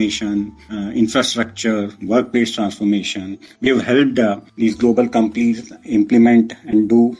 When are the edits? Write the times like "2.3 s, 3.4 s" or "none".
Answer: none